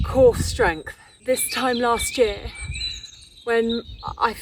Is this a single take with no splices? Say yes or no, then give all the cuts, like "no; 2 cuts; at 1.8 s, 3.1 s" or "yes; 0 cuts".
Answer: no; 1 cut; at 1.1 s